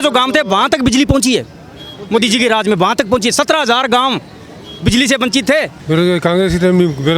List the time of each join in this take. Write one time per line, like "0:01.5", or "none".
0:05.7